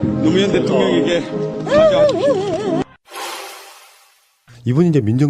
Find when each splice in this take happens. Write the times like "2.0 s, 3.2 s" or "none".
1.8 s